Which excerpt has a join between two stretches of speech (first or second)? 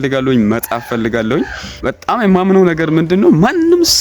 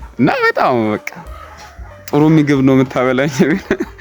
first